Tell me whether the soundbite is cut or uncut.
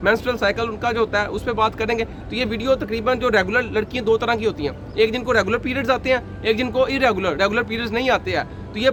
uncut